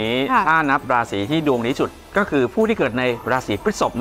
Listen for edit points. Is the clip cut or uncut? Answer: uncut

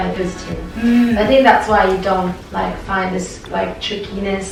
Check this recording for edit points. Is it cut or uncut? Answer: uncut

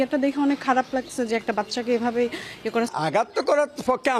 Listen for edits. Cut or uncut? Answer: uncut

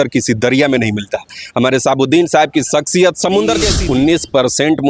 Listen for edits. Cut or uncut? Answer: cut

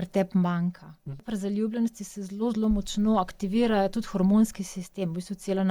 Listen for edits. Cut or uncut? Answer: cut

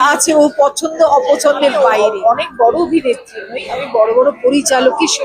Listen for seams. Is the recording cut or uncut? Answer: cut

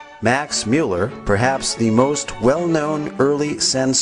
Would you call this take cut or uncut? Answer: cut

